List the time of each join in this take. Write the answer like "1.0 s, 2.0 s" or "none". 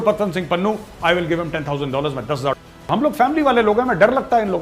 2.9 s